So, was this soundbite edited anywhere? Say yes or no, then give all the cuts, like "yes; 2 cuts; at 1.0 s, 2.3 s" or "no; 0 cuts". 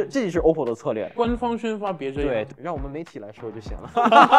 yes; 2 cuts; at 1.1 s, 2.5 s